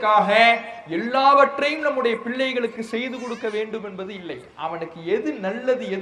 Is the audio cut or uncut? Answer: uncut